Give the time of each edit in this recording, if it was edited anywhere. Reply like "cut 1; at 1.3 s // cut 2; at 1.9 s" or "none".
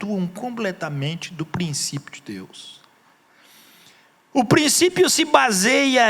cut 1; at 3.3 s